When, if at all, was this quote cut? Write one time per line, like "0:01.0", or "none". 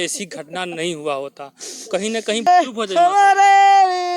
0:02.4